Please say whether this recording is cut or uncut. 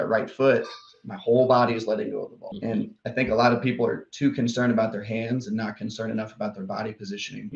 uncut